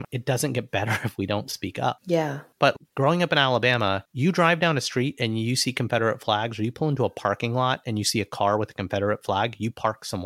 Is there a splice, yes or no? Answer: yes